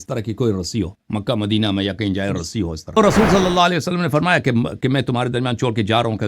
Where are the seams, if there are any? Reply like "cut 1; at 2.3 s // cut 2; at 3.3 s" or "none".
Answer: cut 1; at 3.0 s